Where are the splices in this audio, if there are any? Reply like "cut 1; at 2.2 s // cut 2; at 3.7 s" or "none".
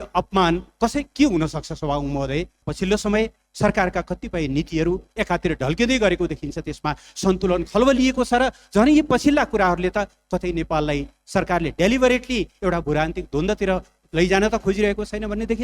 cut 1; at 2.7 s